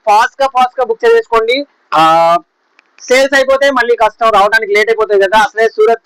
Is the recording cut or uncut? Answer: uncut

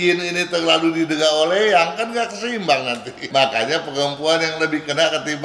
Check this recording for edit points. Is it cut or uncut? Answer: cut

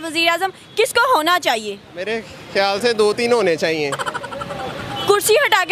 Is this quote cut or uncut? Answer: uncut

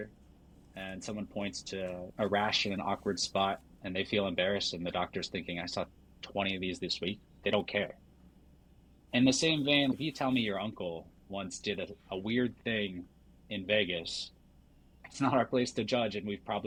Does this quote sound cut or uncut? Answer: uncut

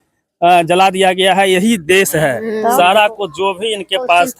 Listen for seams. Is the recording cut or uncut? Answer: cut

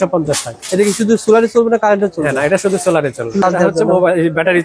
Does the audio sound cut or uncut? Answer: cut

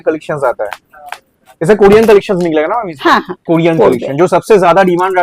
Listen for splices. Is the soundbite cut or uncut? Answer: cut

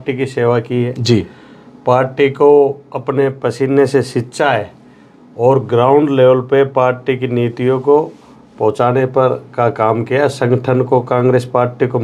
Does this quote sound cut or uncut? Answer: uncut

